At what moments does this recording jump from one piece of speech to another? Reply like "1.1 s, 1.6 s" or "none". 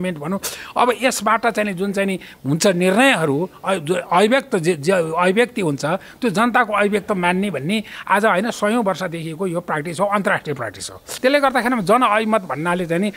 11.1 s